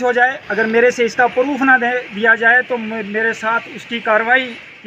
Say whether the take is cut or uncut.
uncut